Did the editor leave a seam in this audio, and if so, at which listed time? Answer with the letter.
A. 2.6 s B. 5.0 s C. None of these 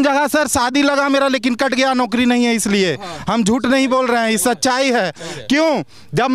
C